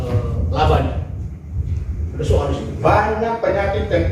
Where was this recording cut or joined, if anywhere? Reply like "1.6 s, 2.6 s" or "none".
2.8 s